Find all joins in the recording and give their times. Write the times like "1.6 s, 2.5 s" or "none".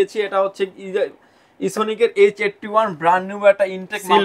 none

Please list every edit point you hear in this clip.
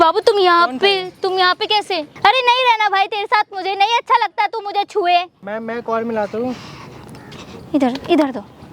2.1 s, 5.4 s

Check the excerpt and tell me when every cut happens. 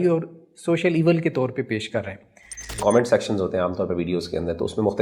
2.8 s

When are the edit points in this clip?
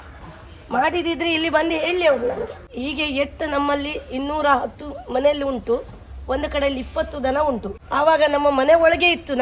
2.6 s, 7.8 s

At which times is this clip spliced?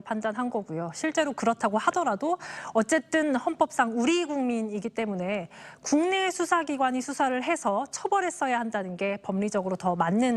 none

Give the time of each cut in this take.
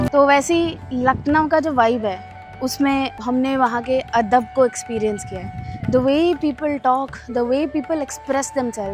3.2 s

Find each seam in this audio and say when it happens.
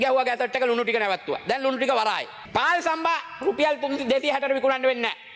2.3 s

